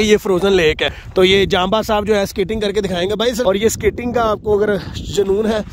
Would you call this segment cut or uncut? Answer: cut